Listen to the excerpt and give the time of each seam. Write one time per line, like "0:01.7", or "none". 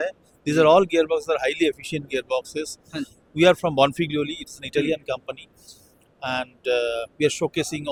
none